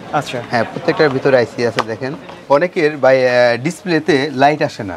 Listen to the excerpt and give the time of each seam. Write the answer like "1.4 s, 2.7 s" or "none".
2.4 s